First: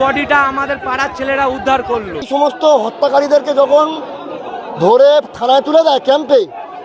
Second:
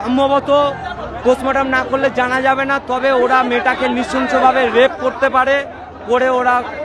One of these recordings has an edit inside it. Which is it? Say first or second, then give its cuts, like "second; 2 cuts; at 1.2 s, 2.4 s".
first; 1 cut; at 2.3 s